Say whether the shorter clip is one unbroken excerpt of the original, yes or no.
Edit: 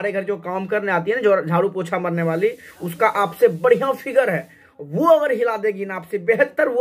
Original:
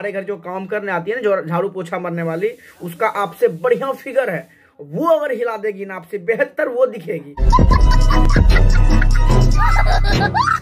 yes